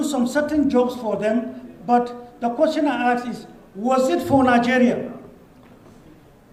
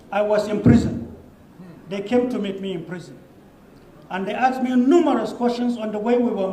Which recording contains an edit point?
second; 1 cut; at 1.1 s

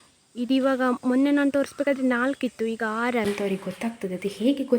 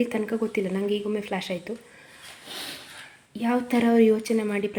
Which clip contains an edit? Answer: first; 1 cut; at 3.2 s

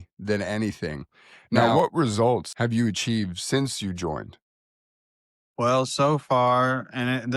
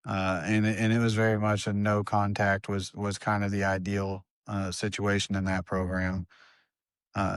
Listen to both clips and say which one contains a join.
first; 2 cuts; at 1.7 s, 2.5 s

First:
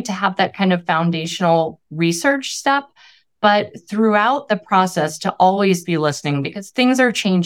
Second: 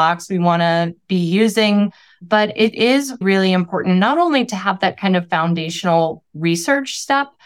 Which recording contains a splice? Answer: second; 2 cuts; at 2.2 s, 3.2 s

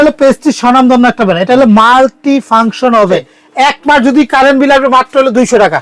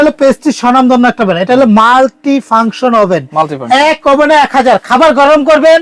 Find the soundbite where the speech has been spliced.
first; 1 cut; at 3.3 s

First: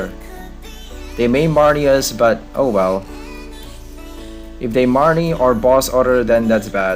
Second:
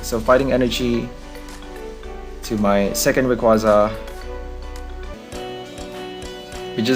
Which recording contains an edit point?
second; 1 cut; at 5.1 s

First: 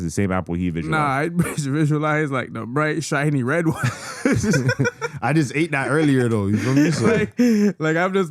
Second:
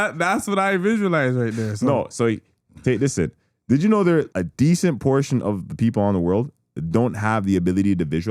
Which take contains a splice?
second; 1 cut; at 4.3 s

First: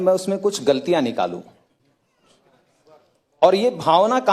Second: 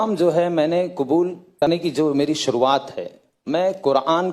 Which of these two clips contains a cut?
second; 1 cut; at 1.6 s

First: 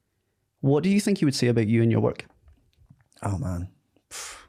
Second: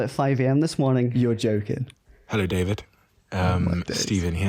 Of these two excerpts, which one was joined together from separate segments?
second; 1 cut; at 1.9 s

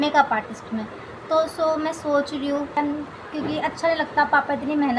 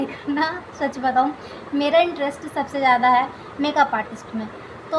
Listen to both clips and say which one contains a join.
first; 1 cut; at 2.8 s

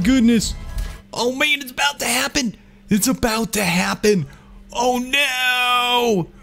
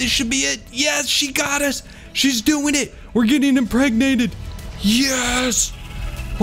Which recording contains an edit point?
first; 1 cut; at 0.9 s

